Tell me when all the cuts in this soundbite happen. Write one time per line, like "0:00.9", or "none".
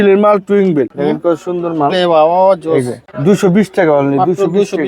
0:00.9
0:03.0